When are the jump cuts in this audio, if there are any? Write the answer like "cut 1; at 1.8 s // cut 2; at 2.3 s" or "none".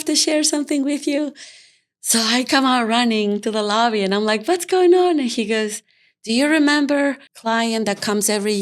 cut 1; at 7.3 s